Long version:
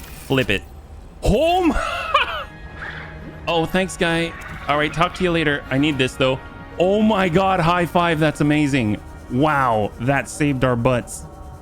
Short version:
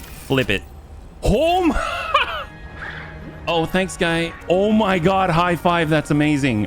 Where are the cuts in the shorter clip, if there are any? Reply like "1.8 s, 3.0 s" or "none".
4.3 s

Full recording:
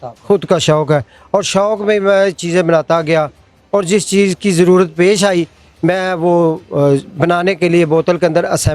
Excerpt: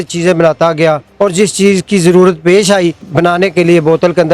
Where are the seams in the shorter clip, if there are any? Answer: 1.1 s, 3.1 s

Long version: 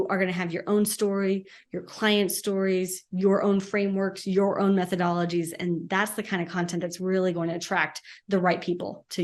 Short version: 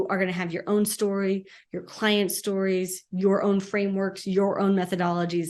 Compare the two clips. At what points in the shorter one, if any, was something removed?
none

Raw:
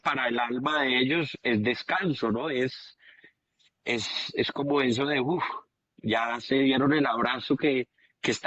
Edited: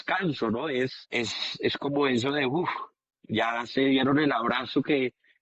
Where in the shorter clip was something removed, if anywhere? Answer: 1.0 s

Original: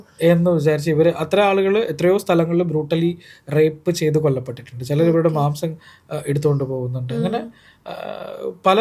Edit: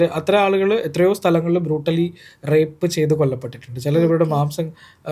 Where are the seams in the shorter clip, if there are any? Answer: none

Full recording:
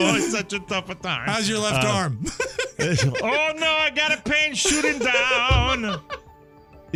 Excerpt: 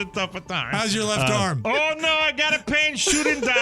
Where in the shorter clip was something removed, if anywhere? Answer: 1.6 s

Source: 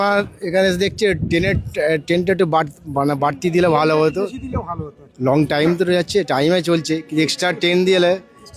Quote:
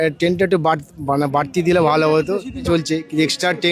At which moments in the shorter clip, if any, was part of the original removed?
2.6 s

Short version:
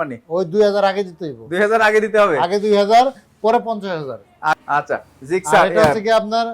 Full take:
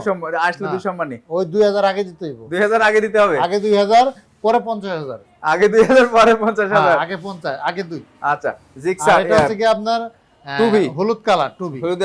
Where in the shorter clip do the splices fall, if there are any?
4.5 s

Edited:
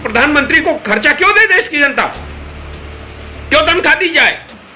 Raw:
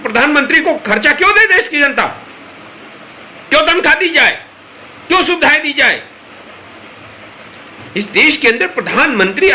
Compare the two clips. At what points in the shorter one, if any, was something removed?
none

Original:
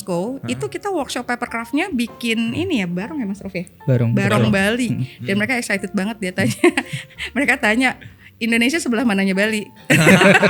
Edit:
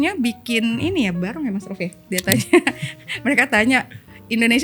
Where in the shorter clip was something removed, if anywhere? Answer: 2.0 s

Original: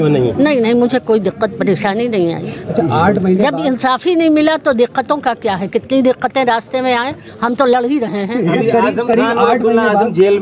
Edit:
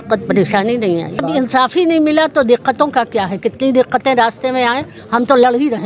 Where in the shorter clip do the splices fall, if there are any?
1.2 s

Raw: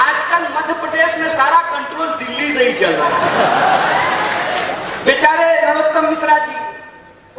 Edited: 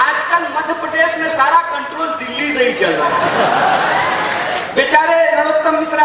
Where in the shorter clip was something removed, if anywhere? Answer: 4.6 s

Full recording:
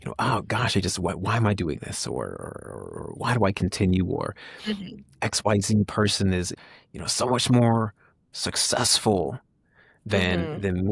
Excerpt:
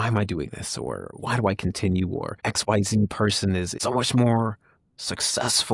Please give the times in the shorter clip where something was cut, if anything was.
1.1 s, 2.4 s, 3.7 s

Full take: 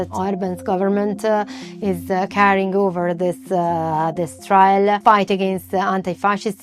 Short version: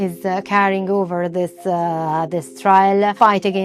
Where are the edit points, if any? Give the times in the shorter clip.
none

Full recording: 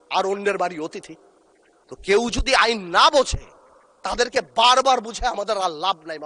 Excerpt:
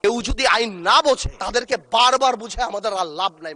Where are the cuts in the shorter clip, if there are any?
1.3 s

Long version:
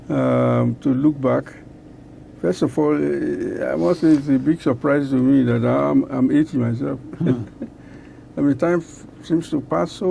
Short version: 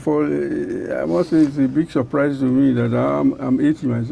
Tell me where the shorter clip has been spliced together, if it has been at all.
none

